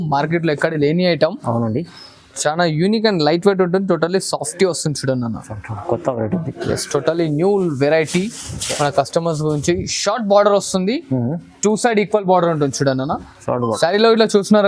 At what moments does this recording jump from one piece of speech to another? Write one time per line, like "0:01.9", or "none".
none